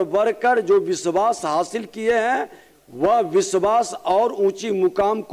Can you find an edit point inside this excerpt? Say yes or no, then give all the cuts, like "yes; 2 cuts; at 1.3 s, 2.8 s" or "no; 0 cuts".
no; 0 cuts